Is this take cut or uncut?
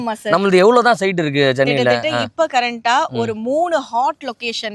uncut